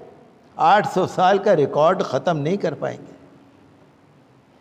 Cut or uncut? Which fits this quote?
uncut